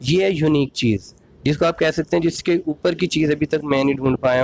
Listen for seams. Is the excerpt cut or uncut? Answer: uncut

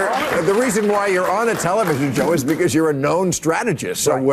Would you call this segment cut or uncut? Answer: uncut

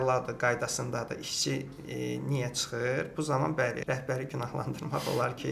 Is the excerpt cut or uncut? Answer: cut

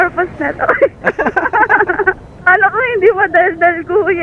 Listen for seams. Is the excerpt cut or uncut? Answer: uncut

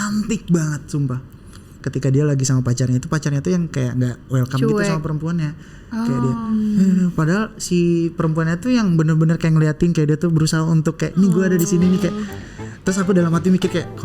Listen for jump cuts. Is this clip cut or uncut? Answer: cut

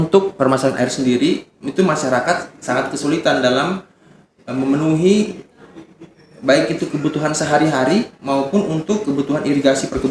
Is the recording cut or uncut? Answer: uncut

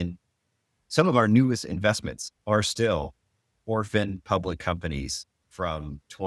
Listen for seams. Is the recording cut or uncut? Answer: uncut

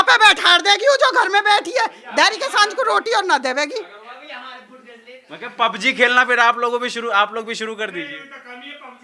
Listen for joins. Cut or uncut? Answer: uncut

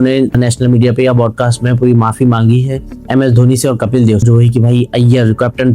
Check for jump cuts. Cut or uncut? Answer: cut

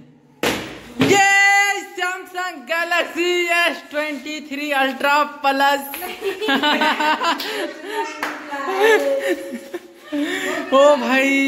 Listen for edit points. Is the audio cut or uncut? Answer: uncut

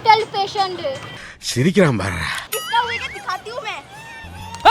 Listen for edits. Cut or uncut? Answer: cut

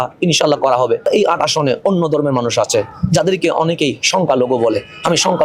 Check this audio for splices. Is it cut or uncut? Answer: cut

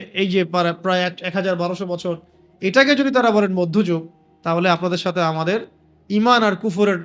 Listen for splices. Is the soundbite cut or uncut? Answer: uncut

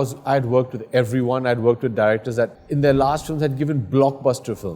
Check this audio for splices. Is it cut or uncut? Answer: cut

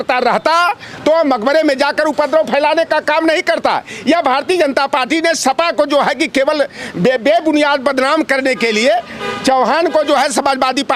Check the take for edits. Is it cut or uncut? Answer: uncut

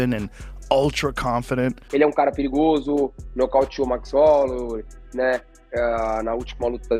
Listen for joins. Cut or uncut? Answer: cut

